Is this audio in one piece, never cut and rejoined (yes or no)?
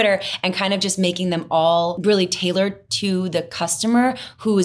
no